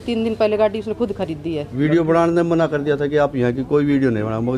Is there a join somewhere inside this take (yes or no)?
yes